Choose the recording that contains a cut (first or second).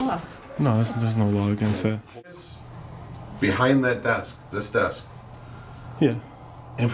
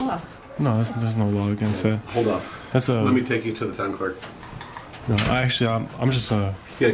first